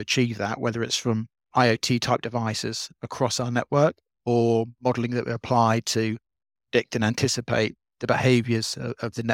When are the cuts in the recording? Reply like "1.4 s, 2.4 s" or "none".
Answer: none